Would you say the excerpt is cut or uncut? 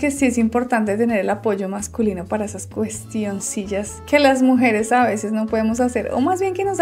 uncut